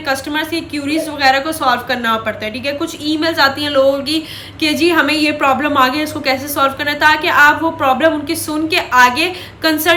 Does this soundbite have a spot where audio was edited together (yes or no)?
no